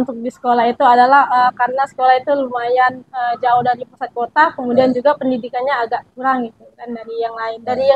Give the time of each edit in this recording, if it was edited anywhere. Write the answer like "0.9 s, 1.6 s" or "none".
none